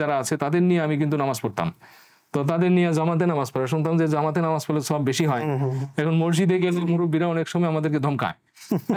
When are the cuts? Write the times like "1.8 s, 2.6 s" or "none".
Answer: none